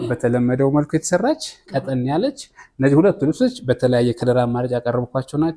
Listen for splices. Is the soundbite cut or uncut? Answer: uncut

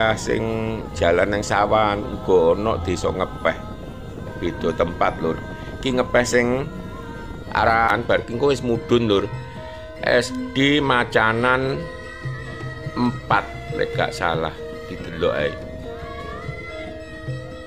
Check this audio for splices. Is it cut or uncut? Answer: cut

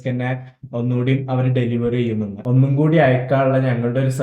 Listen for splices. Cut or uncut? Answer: cut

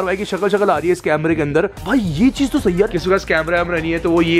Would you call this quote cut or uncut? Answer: uncut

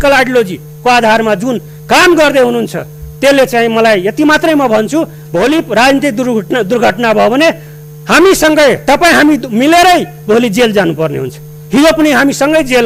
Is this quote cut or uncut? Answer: uncut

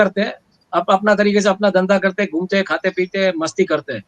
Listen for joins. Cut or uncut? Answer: uncut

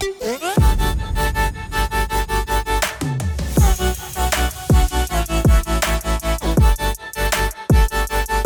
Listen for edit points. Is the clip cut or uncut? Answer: uncut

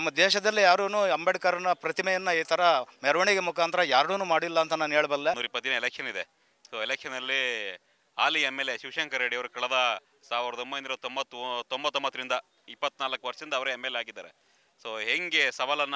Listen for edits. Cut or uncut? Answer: cut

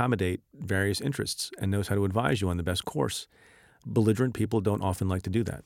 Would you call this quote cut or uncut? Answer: uncut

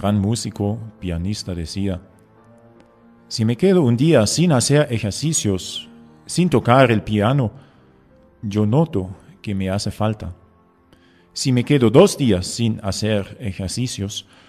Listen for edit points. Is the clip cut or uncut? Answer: cut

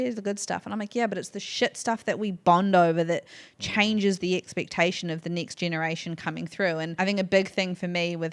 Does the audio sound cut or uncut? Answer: uncut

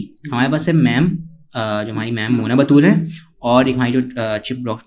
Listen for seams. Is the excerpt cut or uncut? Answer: uncut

